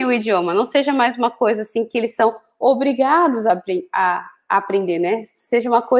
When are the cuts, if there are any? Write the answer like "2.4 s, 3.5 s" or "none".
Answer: none